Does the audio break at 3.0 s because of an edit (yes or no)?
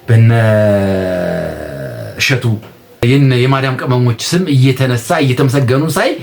yes